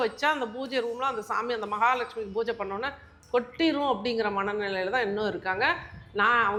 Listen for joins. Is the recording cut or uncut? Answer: uncut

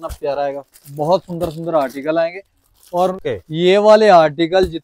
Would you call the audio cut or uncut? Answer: cut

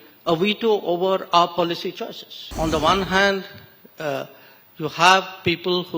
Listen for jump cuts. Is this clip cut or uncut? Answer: cut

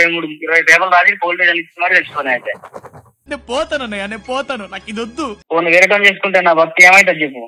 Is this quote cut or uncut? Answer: uncut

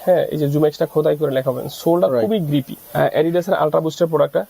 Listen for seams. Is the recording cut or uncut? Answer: cut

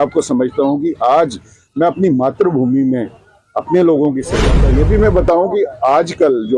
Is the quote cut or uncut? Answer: cut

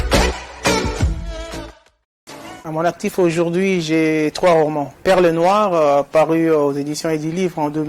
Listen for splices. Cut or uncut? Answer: cut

